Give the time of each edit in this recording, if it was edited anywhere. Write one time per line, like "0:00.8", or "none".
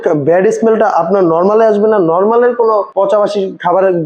0:02.9